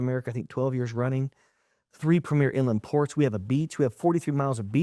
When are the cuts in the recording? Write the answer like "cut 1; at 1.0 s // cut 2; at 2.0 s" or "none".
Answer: none